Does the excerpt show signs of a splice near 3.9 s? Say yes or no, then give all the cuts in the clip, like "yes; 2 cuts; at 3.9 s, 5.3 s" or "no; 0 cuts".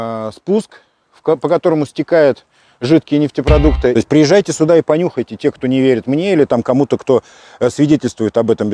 yes; 1 cut; at 3.9 s